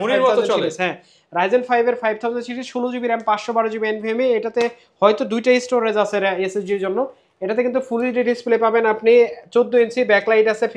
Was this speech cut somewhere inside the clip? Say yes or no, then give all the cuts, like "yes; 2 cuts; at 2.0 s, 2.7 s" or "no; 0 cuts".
no; 0 cuts